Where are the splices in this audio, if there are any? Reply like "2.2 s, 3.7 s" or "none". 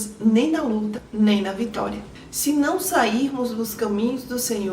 2.1 s